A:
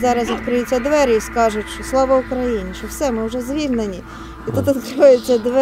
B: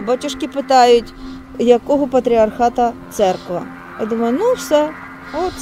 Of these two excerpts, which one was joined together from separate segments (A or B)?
B